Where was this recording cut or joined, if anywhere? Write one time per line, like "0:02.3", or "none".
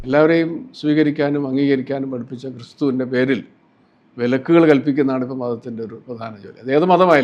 none